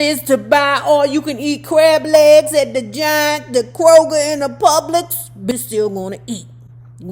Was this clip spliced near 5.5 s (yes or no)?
yes